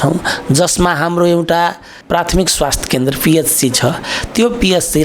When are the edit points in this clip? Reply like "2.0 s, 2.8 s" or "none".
1.9 s